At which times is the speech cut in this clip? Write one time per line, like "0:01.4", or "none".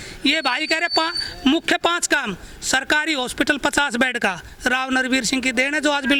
none